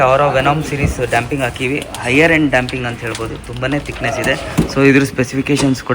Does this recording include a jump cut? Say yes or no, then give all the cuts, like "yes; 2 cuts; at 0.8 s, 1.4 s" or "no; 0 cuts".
no; 0 cuts